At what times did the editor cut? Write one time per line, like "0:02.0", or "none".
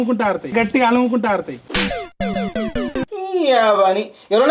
0:01.7
0:03.2